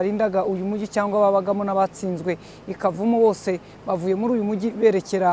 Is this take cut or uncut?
uncut